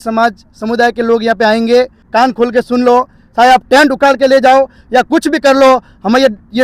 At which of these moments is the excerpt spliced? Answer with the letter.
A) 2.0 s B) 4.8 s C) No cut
A